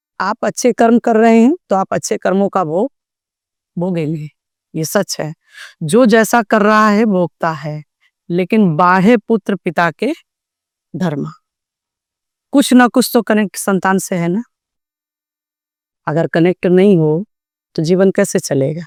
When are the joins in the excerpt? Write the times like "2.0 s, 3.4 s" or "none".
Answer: none